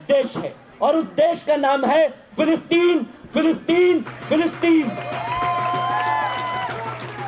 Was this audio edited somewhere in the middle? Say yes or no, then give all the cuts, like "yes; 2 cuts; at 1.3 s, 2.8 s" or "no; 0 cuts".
no; 0 cuts